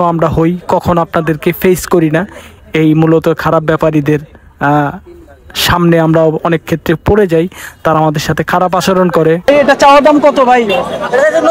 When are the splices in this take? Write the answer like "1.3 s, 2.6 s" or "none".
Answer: 9.5 s